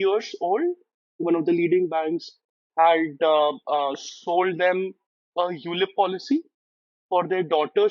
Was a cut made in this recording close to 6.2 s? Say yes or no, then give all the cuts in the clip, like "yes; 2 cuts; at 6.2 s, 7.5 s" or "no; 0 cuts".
no; 1 cut; at 1.2 s